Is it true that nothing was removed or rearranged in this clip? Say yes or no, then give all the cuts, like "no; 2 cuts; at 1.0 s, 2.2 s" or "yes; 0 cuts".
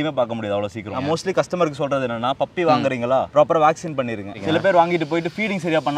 no; 2 cuts; at 0.9 s, 4.4 s